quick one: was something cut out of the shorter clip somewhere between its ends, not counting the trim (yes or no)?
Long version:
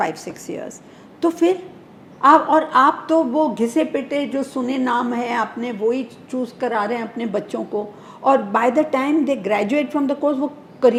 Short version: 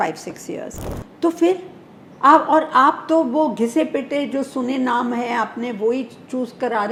no